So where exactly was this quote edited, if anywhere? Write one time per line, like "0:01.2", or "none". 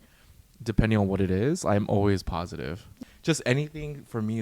0:02.9